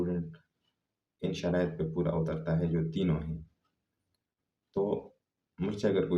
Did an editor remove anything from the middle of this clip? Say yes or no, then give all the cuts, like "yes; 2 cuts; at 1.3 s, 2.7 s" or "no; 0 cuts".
no; 0 cuts